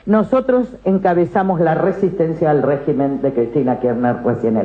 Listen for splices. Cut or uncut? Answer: uncut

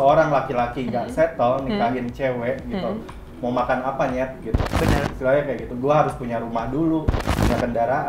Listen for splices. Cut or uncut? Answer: uncut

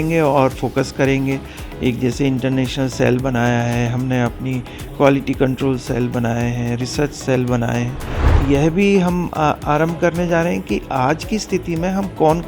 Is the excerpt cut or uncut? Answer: cut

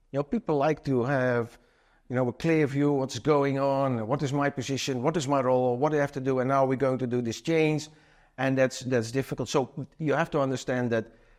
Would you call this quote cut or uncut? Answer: uncut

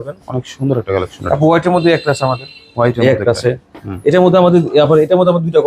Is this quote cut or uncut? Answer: uncut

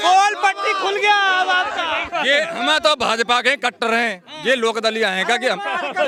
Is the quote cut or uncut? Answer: uncut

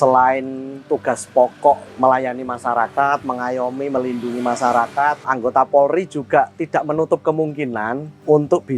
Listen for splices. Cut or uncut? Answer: cut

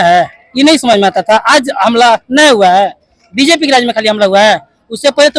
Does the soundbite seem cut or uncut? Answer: uncut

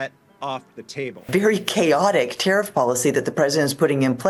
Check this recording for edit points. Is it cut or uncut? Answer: uncut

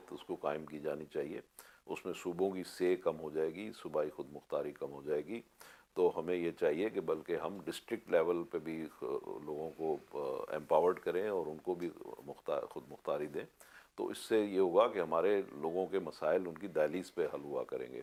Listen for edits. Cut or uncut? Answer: uncut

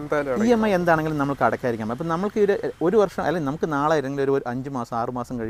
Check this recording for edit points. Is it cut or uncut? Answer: uncut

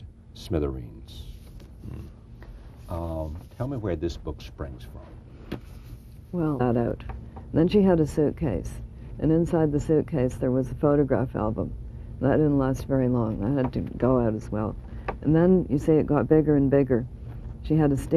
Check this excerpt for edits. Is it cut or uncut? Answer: uncut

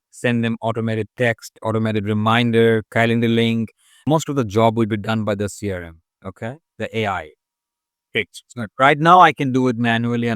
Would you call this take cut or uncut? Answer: cut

